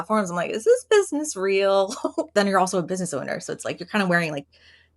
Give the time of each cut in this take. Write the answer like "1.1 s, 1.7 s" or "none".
2.3 s